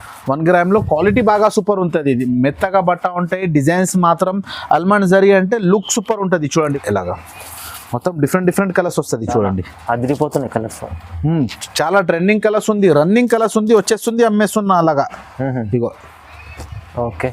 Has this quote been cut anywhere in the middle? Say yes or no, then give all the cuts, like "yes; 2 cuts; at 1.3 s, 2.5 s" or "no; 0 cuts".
yes; 1 cut; at 6.7 s